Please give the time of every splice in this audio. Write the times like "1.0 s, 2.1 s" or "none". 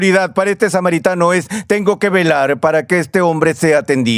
none